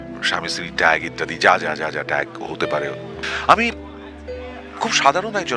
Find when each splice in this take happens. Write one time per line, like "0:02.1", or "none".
0:03.1